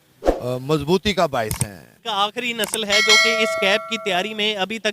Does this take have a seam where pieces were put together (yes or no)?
yes